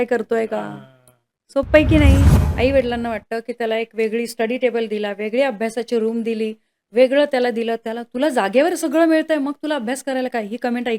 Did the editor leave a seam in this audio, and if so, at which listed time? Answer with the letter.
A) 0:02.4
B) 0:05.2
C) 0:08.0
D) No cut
A